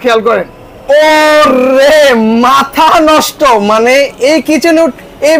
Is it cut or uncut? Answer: uncut